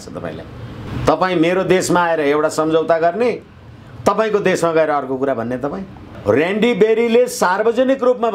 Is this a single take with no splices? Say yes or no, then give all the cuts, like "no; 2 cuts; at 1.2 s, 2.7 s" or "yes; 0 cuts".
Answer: no; 2 cuts; at 0.9 s, 6.2 s